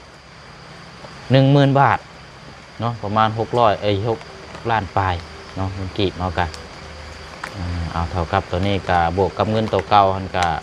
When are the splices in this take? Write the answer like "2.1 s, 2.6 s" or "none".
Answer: none